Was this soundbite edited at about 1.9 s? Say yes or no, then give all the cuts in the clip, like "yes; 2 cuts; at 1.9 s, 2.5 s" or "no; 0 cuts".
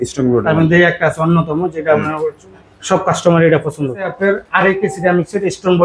no; 1 cut; at 4.1 s